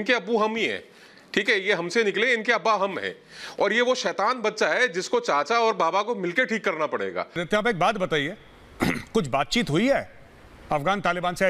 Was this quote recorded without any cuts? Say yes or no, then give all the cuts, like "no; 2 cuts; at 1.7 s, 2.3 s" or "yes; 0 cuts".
no; 1 cut; at 7.4 s